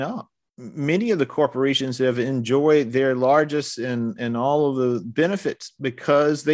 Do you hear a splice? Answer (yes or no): no